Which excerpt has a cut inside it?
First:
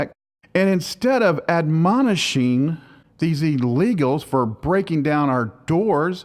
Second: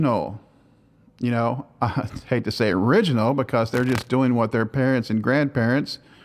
first; 1 cut; at 5.1 s

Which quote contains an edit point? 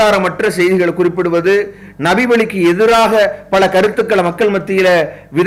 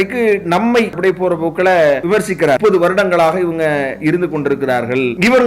second; 2 cuts; at 1.0 s, 2.3 s

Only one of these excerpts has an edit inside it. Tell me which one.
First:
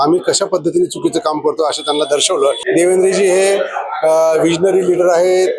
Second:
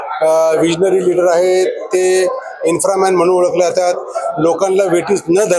first; 1 cut; at 2.6 s

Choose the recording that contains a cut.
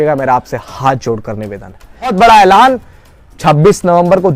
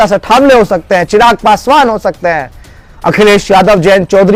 first; 1 cut; at 2.1 s

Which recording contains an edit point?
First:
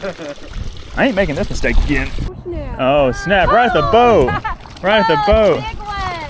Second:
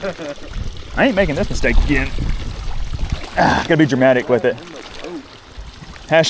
first; 1 cut; at 2.3 s

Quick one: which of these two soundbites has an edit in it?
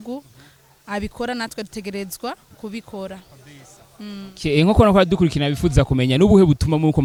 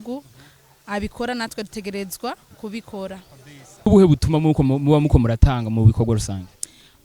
second; 1 cut; at 3.9 s

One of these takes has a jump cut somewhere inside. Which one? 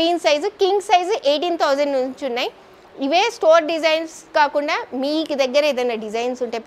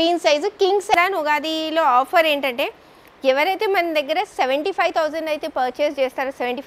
second; 1 cut; at 0.9 s

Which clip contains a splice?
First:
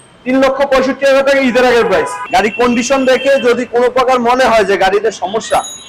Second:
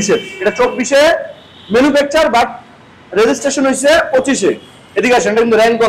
first; 1 cut; at 2.2 s

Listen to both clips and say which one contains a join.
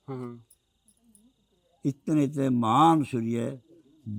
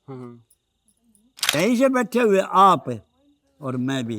second; 1 cut; at 1.5 s

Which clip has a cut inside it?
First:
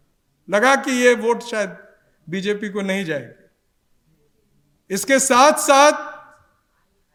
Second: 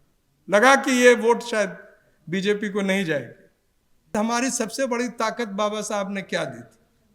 second; 1 cut; at 4.1 s

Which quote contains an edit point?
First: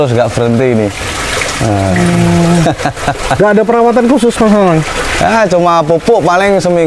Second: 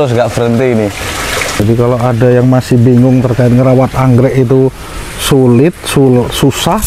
second; 1 cut; at 1.6 s

